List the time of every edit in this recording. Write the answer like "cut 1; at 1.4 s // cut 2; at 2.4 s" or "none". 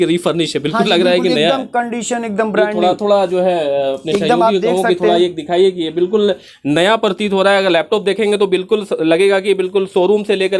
none